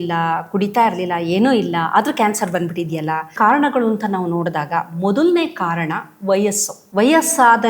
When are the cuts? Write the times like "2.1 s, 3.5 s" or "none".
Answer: 3.3 s, 6.7 s